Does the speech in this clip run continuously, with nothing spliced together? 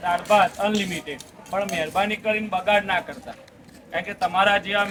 yes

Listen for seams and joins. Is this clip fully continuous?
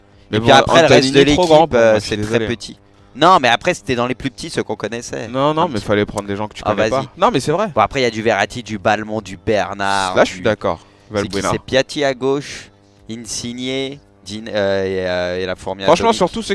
no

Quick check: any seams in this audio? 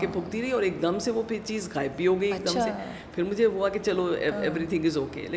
no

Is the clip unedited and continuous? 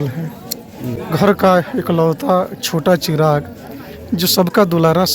no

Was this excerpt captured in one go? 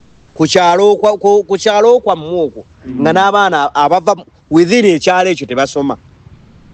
yes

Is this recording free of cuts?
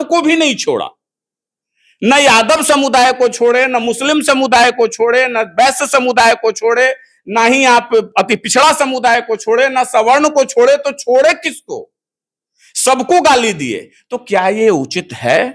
yes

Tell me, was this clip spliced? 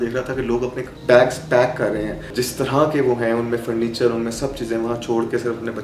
yes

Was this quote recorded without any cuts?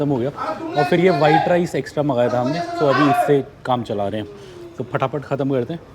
yes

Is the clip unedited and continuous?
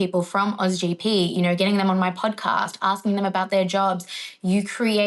yes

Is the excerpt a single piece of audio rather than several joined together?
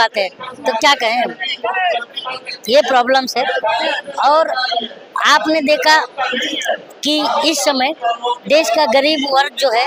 yes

